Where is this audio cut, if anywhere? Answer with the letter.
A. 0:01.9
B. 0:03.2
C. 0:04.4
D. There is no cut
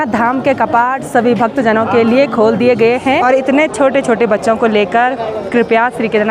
B